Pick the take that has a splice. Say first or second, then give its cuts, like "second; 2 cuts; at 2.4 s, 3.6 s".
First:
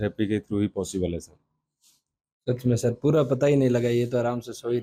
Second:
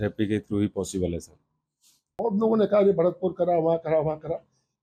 second; 1 cut; at 2.1 s